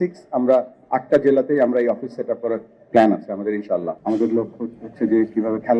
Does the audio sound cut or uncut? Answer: cut